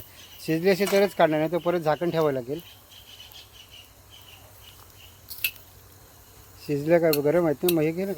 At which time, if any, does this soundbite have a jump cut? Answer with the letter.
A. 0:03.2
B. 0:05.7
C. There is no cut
C